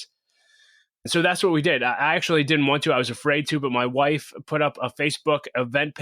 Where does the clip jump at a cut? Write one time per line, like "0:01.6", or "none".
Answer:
0:01.0